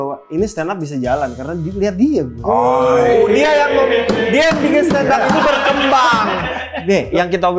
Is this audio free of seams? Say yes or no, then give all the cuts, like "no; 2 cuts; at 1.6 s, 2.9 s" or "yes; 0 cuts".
no; 1 cut; at 6.7 s